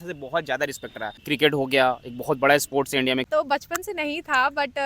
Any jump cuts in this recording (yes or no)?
yes